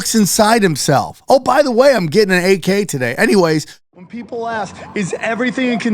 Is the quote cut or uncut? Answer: cut